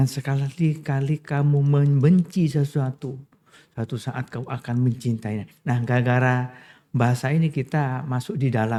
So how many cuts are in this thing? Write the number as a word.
zero